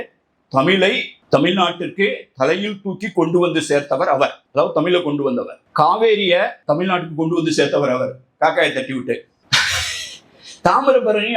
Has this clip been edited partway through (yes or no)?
yes